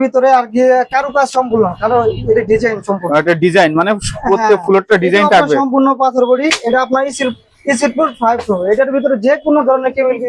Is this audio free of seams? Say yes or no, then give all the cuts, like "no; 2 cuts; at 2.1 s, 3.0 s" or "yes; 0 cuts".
yes; 0 cuts